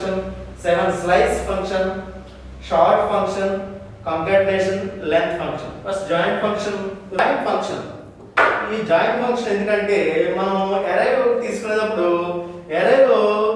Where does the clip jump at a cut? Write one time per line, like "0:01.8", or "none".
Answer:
0:07.2

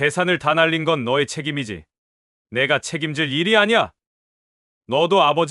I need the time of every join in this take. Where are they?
none

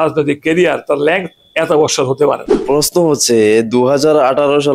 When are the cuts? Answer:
0:02.6

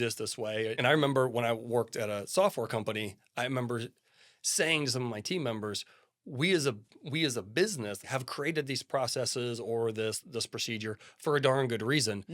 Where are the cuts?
0:00.8
0:08.0

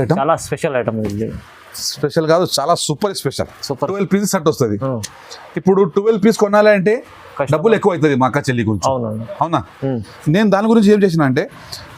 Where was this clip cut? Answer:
0:03.9

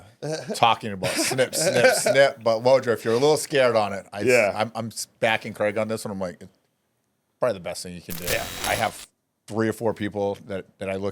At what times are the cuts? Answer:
0:08.5

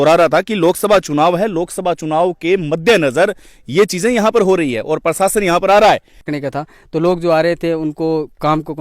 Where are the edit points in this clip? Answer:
0:06.2

